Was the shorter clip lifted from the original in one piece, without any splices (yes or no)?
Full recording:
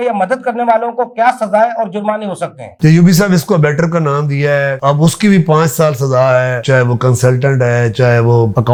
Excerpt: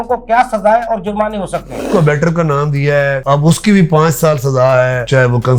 no